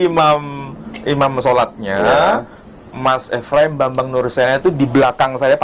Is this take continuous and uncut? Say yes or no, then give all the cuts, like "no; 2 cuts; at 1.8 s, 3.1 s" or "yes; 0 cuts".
yes; 0 cuts